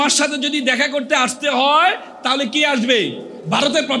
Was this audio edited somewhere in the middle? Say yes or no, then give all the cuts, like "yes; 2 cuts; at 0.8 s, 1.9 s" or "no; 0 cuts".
no; 0 cuts